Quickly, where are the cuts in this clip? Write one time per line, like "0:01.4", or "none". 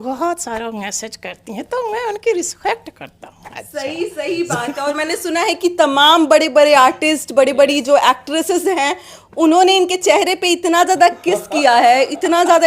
none

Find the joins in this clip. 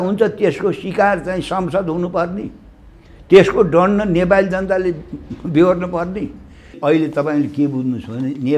0:06.7

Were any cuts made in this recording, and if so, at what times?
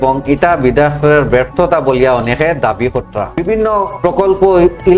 0:03.4

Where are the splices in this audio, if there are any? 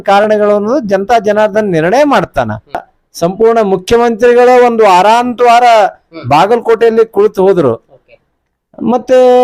0:02.9

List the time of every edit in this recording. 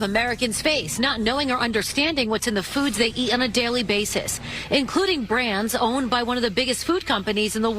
0:01.4

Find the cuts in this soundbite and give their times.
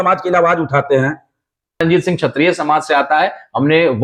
0:01.8

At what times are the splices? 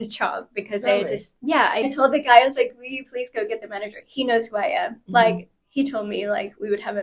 0:01.9

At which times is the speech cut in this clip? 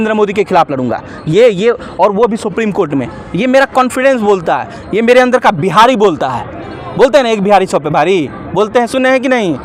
none

